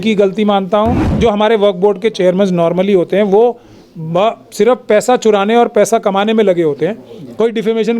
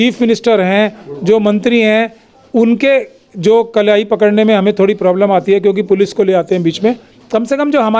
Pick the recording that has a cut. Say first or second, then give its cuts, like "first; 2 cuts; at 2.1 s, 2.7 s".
first; 1 cut; at 1.1 s